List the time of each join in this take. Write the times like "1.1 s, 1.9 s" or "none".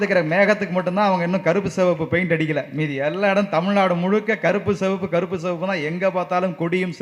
none